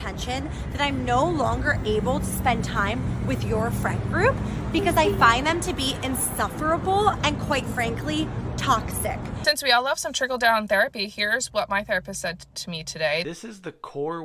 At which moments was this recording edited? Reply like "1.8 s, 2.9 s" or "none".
9.3 s, 13.2 s